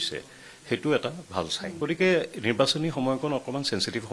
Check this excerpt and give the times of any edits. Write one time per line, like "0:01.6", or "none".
0:01.6